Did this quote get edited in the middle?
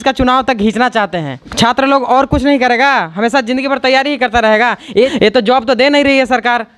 yes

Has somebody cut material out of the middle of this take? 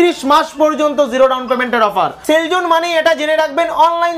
yes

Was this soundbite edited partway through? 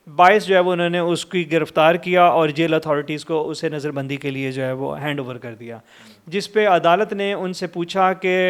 no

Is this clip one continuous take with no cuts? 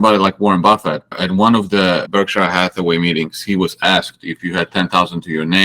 no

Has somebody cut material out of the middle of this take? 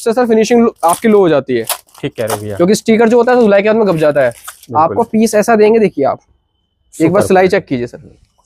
no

